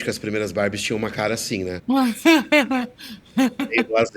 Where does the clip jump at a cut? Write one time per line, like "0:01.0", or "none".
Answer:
0:01.8